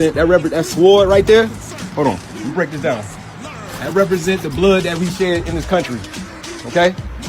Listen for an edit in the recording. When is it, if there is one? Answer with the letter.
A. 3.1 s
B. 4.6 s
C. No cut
B